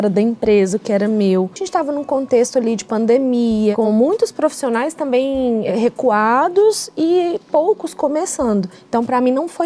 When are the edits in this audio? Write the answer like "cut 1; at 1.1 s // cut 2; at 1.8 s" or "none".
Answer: cut 1; at 1.6 s // cut 2; at 3.8 s // cut 3; at 5.7 s // cut 4; at 8.8 s